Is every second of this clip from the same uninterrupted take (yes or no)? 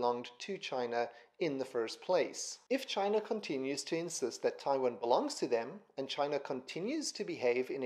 no